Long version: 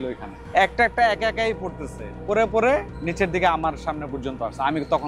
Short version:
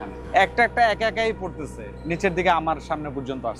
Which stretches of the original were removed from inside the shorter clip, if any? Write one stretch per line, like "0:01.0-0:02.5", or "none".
0:02.2-0:02.9